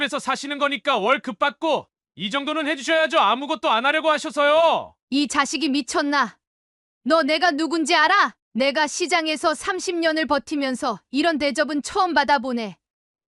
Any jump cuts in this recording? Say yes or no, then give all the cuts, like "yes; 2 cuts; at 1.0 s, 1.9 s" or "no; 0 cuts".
yes; 2 cuts; at 4.9 s, 8.4 s